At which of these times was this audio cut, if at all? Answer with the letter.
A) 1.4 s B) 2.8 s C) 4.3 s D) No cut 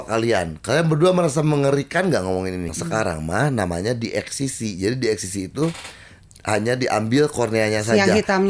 B